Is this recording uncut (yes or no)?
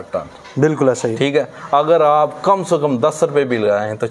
yes